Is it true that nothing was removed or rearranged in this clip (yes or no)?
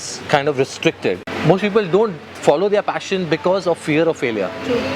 no